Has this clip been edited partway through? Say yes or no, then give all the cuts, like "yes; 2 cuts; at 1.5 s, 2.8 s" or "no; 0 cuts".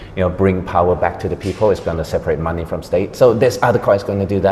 no; 0 cuts